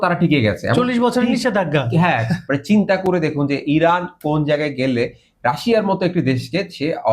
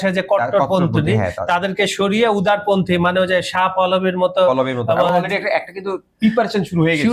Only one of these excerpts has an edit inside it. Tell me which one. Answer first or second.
first